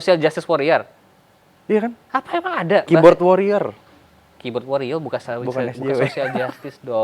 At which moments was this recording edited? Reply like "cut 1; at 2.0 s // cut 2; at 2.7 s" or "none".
none